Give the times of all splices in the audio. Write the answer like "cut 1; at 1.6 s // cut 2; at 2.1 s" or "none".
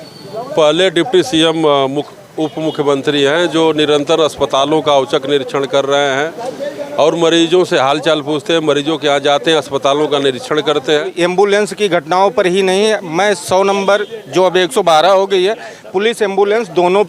cut 1; at 11.1 s